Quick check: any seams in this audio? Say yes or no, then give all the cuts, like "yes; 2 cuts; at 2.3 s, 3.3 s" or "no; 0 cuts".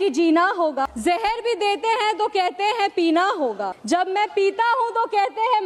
yes; 2 cuts; at 0.9 s, 3.7 s